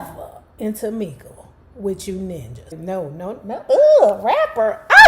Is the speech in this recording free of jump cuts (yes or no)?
no